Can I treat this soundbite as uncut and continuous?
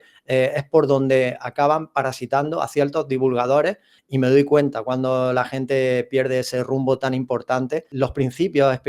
no; 2 cuts; at 4.0 s, 7.9 s

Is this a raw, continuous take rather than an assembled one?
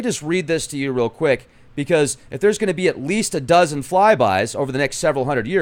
no; 1 cut; at 3.2 s

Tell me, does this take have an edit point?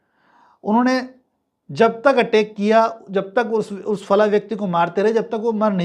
no; 0 cuts

